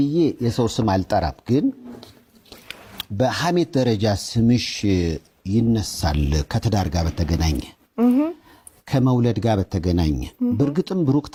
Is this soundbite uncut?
yes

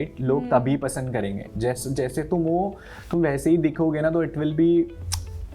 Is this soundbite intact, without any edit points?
yes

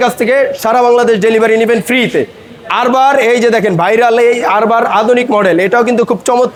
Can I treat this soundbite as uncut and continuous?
yes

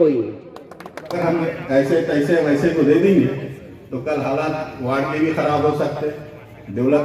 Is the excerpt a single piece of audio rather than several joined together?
no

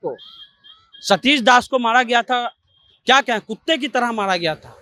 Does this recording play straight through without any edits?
yes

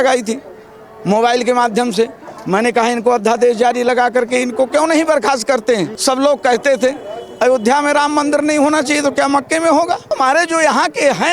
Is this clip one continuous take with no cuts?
no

